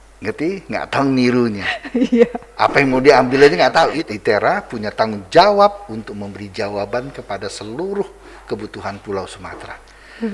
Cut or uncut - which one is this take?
cut